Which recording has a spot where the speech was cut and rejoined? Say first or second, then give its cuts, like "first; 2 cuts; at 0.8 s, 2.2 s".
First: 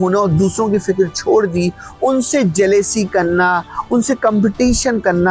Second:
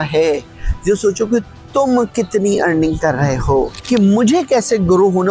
second; 1 cut; at 3.8 s